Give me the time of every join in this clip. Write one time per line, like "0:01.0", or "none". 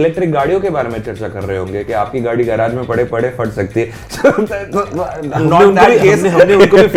none